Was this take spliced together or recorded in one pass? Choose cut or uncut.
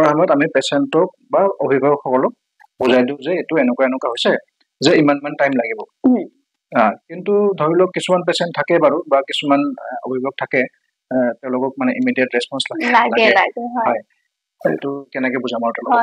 uncut